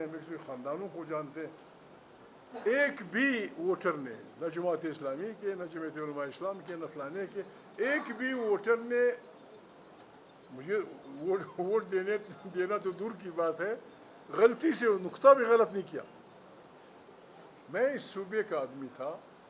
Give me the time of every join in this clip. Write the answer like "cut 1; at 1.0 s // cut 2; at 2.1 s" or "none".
cut 1; at 17.6 s